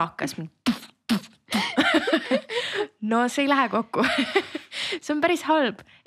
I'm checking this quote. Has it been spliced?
no; 0 cuts

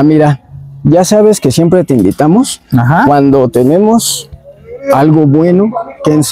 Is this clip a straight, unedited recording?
yes; 0 cuts

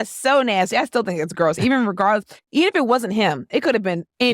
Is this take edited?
no; 0 cuts

